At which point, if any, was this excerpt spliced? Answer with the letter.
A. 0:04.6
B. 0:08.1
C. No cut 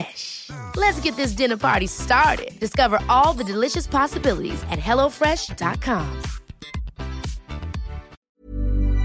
B